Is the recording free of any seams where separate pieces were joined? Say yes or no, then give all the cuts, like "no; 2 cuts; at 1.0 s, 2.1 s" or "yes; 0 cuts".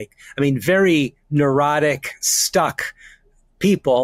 yes; 0 cuts